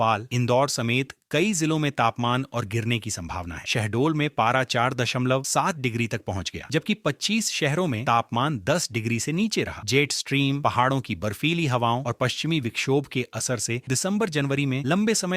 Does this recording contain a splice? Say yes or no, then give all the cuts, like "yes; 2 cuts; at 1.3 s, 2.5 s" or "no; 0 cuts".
no; 0 cuts